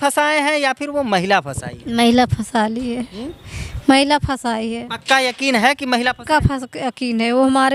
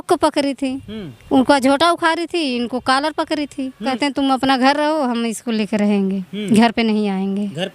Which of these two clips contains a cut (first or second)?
second